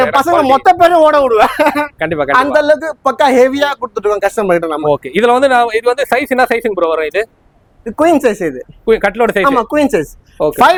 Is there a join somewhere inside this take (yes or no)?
no